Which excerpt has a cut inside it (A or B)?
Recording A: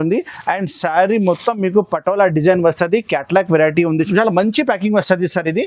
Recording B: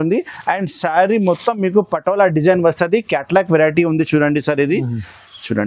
A